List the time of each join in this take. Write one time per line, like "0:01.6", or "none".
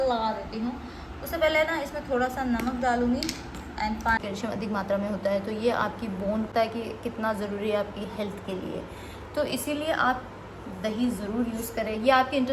0:04.2